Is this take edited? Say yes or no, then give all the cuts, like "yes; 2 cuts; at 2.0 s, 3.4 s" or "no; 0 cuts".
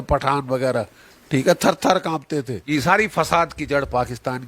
yes; 1 cut; at 2.7 s